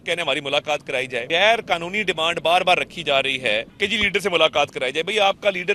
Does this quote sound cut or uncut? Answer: cut